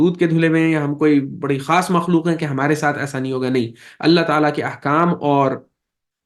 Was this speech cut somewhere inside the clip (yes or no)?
no